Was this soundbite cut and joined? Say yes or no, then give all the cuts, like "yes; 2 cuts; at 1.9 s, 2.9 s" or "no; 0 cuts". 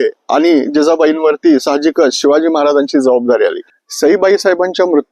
yes; 1 cut; at 3.7 s